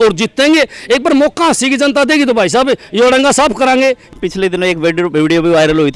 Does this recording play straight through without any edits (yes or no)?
no